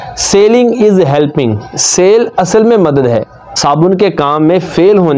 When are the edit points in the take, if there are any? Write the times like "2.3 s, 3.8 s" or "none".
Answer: 3.4 s